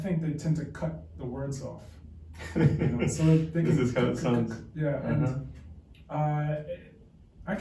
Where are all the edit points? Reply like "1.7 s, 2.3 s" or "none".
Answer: none